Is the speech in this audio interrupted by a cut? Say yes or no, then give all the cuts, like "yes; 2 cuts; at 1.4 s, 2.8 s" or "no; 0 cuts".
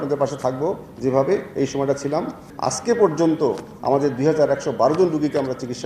yes; 1 cut; at 2.5 s